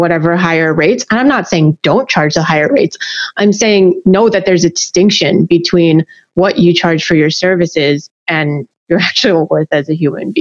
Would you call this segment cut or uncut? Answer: uncut